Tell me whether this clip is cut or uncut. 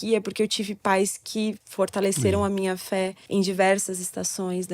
cut